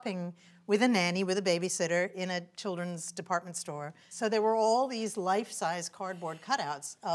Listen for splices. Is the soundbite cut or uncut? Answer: cut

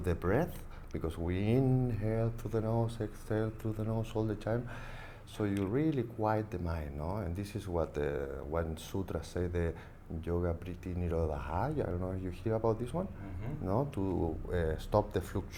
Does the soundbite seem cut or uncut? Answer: uncut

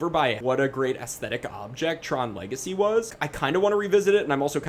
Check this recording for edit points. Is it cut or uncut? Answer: uncut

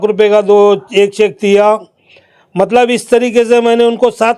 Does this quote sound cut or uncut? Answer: uncut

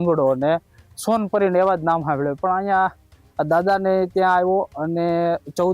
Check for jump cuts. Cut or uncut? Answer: uncut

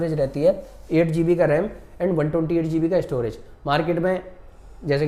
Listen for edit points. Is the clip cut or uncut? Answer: uncut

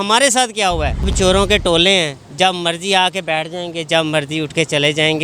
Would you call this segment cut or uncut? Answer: cut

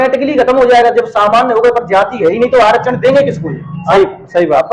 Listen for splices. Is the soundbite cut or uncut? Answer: uncut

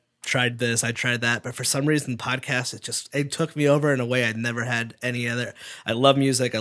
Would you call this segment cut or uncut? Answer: uncut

